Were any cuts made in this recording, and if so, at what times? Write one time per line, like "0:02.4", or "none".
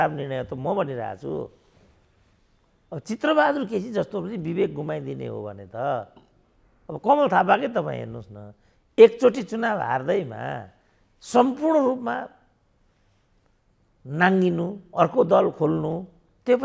none